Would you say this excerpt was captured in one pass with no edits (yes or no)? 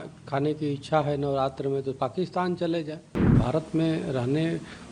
no